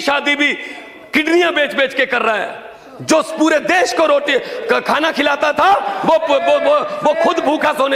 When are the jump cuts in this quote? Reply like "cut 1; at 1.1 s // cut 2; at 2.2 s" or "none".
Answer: none